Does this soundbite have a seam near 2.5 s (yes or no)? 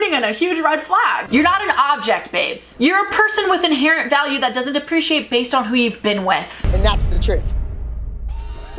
no